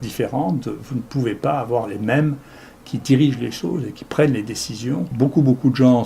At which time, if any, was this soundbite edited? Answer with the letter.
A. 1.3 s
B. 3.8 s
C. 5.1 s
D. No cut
C